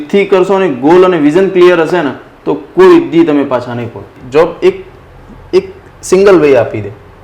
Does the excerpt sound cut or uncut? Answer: cut